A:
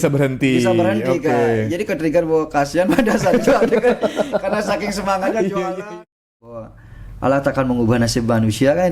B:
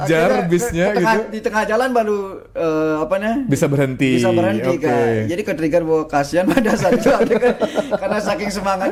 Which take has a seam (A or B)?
A